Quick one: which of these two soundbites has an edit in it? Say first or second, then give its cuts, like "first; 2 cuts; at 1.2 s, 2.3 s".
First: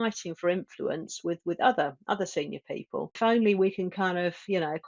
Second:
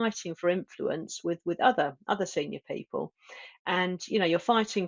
first; 1 cut; at 3.2 s